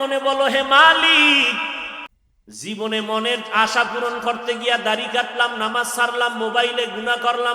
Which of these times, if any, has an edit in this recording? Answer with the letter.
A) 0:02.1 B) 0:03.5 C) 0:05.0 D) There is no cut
A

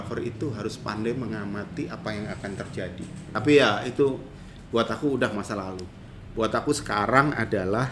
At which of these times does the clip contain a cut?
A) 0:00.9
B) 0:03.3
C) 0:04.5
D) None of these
B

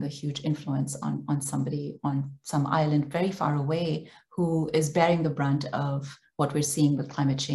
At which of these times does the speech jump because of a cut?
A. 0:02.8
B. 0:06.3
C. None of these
C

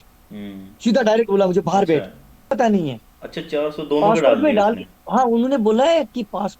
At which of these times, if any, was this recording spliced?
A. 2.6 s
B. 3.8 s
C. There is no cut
A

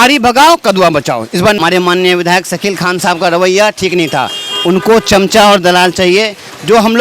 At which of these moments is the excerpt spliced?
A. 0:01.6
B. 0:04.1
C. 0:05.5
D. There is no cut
A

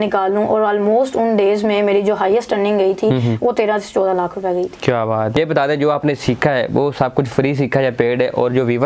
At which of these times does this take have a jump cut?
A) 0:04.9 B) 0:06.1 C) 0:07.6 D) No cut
D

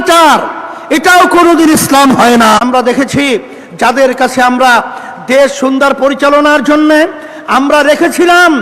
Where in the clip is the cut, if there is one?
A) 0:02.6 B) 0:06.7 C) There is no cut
A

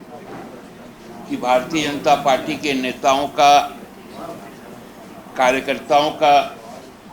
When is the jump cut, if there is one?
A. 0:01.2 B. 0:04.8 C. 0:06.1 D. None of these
D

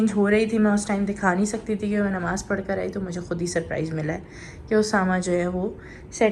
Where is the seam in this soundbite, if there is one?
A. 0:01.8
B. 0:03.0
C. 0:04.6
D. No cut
D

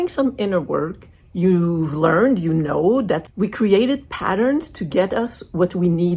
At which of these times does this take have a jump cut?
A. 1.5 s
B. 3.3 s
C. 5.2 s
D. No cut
B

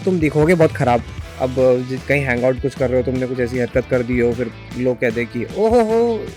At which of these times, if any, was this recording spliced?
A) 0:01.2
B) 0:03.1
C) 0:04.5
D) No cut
A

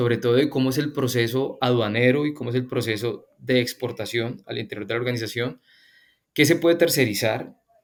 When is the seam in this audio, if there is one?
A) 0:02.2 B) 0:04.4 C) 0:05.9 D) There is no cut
D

